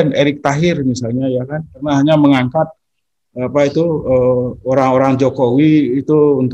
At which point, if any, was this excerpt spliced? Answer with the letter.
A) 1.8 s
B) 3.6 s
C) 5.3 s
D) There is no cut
A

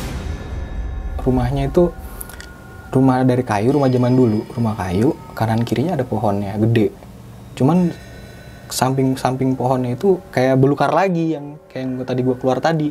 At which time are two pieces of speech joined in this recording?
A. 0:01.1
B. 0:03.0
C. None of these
A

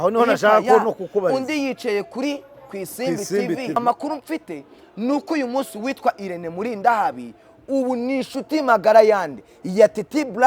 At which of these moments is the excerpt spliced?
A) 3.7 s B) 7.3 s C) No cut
A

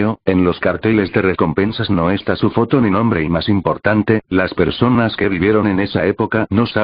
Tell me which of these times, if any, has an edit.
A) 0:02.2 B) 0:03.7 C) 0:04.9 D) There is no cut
A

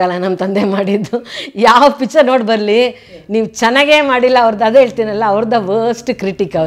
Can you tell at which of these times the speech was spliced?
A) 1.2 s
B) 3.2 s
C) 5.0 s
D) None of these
D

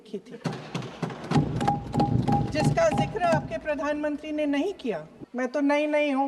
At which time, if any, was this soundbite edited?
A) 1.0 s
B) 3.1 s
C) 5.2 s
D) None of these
C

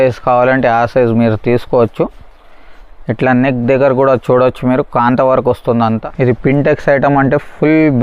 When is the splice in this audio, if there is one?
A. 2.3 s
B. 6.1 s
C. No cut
B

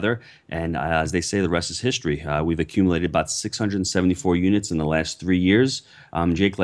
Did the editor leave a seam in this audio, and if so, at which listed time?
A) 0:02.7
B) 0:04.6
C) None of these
C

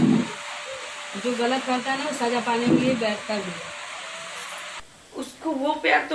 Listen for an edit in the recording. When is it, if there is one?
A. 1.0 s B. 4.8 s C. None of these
B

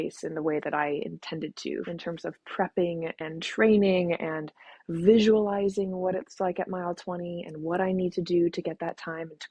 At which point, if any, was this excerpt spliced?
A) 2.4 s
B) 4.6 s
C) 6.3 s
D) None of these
D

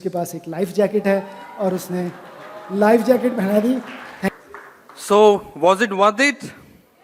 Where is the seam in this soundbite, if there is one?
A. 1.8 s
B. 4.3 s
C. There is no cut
B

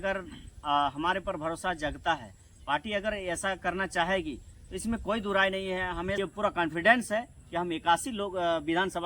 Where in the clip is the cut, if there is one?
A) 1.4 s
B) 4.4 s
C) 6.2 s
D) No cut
C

